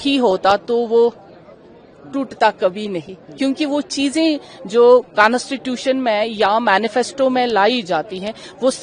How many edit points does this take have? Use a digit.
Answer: 0